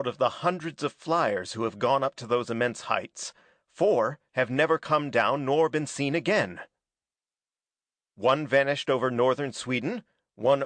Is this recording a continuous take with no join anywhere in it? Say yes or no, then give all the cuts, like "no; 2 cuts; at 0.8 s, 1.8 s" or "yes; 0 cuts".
yes; 0 cuts